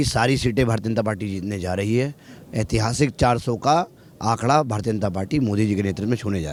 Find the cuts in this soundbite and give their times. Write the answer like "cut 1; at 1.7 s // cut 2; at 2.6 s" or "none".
none

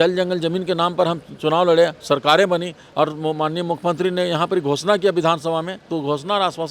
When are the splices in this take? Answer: cut 1; at 2.8 s

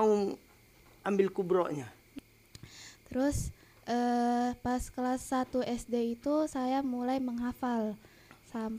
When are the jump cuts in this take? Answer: cut 1; at 2.1 s

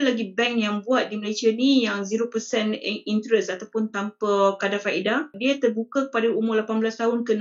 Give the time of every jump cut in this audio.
cut 1; at 5.4 s

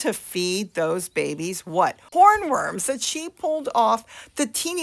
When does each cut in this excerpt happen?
none

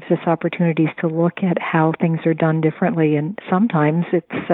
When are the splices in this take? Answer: none

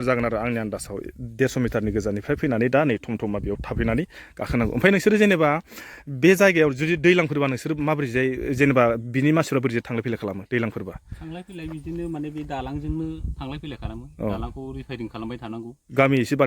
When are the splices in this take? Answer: none

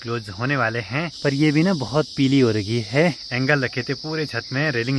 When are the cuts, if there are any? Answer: cut 1; at 1.0 s // cut 2; at 3.2 s

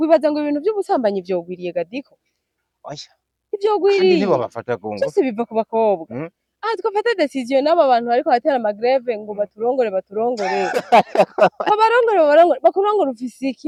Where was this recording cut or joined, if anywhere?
none

